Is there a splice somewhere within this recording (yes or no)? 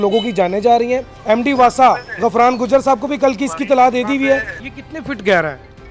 yes